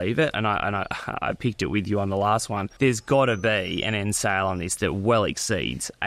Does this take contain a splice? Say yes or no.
yes